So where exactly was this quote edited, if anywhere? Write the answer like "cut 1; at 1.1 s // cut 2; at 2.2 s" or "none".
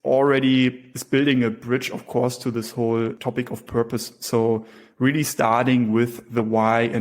cut 1; at 0.9 s // cut 2; at 3.2 s